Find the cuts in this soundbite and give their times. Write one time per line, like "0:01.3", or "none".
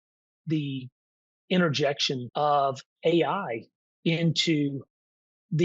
0:02.3